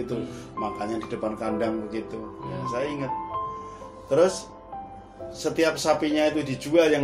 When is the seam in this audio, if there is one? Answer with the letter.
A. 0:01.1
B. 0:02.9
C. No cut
C